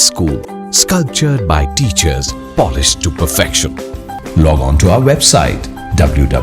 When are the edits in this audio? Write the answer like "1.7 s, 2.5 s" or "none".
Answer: 4.1 s